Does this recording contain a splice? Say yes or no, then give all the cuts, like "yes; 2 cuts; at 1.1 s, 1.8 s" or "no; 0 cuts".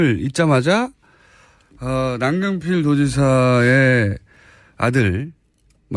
yes; 1 cut; at 3.3 s